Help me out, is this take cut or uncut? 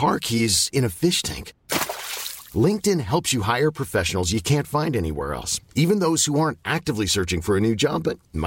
uncut